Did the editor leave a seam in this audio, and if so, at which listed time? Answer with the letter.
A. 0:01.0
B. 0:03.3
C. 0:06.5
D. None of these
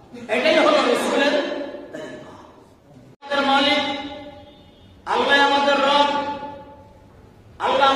B